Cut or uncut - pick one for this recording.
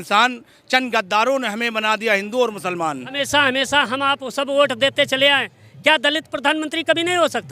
cut